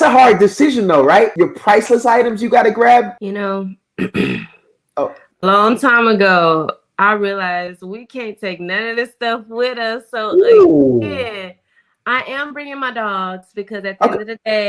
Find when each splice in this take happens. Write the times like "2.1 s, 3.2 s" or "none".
1.3 s, 3.1 s